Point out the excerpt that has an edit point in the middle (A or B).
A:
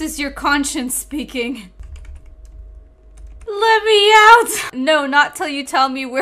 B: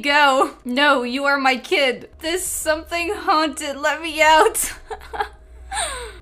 A